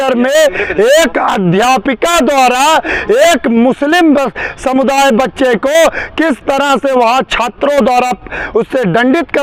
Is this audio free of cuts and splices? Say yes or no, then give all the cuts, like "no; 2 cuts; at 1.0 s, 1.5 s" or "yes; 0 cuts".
yes; 0 cuts